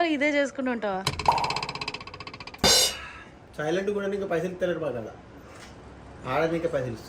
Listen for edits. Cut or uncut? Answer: uncut